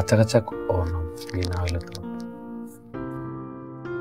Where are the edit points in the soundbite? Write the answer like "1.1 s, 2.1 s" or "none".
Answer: none